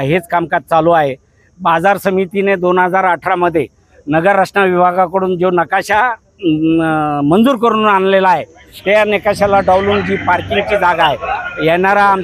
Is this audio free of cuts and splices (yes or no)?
yes